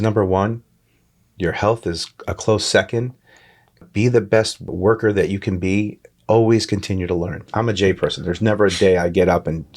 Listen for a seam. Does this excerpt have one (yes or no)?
yes